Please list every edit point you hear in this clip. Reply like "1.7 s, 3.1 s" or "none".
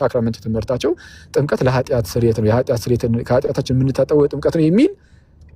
none